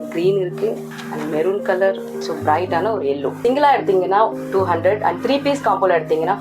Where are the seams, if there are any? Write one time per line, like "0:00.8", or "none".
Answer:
0:00.9
0:02.1
0:03.4

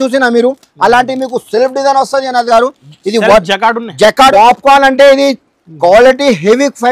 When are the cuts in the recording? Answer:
0:04.3

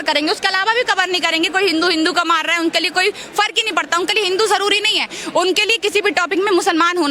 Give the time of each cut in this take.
none

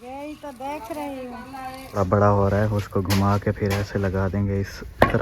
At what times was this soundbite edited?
0:02.0

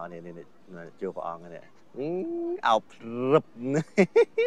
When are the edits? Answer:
none

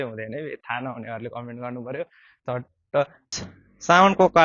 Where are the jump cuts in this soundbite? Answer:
0:03.5

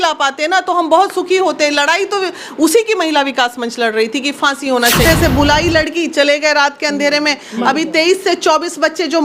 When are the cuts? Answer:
0:05.0

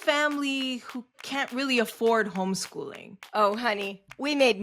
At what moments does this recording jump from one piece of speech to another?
0:01.2

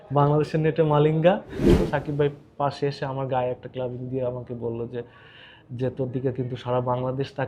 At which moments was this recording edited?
0:01.7

